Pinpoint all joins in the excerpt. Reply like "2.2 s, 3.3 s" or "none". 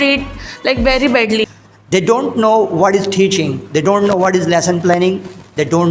1.7 s